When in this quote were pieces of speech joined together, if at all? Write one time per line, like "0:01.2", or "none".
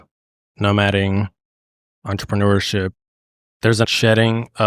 0:03.8

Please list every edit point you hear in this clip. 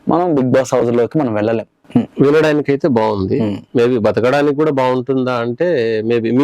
0:01.7

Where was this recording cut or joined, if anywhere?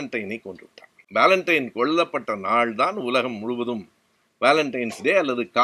0:00.9

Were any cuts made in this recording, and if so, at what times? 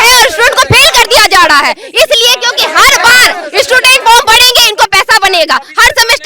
none

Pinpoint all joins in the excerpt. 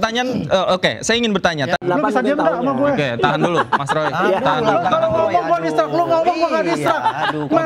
0:01.8

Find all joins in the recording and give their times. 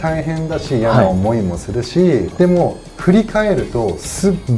0:02.3

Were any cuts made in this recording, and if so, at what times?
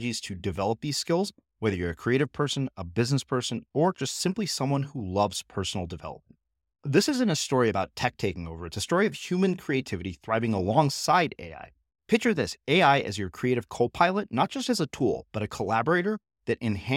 none

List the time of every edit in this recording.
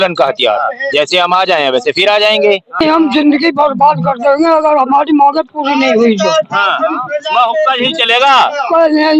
0:02.8

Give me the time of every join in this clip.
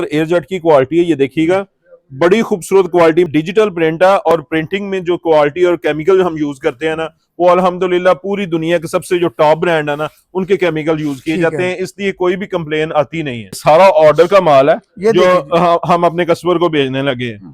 0:03.3
0:13.6

